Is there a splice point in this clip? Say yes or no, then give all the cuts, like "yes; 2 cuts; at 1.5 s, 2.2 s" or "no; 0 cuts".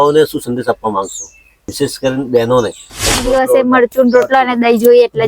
yes; 2 cuts; at 1.7 s, 3.2 s